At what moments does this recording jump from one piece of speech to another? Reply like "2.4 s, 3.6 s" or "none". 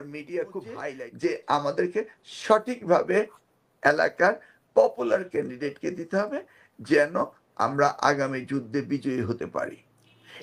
1.0 s